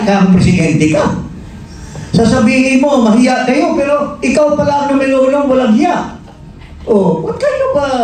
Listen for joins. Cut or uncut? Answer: uncut